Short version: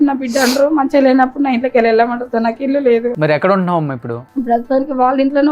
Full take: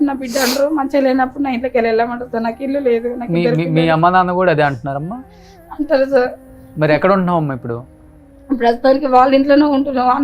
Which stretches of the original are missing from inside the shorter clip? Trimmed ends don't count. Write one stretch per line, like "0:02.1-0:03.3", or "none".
0:03.1-0:06.7
0:07.8-0:08.3